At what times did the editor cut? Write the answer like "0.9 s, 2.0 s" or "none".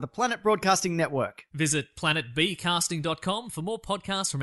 none